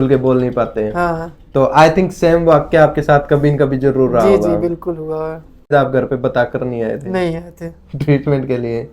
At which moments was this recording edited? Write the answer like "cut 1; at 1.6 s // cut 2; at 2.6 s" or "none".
cut 1; at 5.7 s

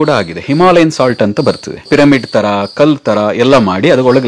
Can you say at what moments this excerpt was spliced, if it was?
cut 1; at 1.8 s

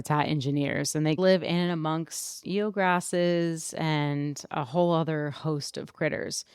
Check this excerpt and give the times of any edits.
cut 1; at 1.2 s

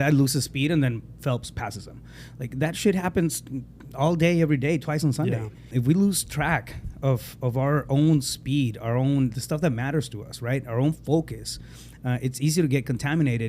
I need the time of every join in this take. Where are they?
cut 1; at 5.7 s

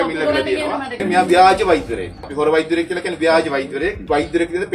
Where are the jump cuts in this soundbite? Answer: cut 1; at 1.0 s

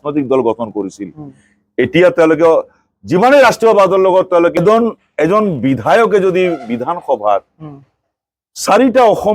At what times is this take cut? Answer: cut 1; at 4.6 s

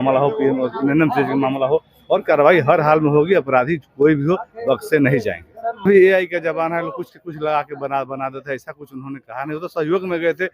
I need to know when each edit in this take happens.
cut 1; at 5.8 s

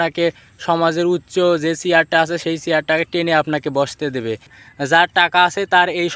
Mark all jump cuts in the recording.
cut 1; at 4.6 s

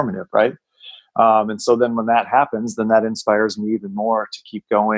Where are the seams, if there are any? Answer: none

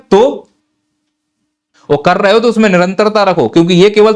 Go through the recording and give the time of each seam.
cut 1; at 1.7 s

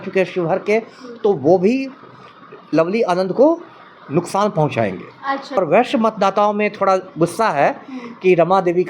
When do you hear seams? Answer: cut 1; at 5.6 s

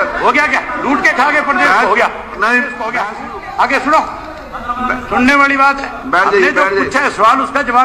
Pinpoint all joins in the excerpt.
cut 1; at 2.9 s

